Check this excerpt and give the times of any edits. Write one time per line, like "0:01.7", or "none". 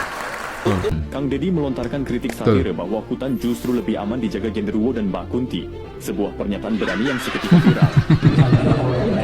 0:01.0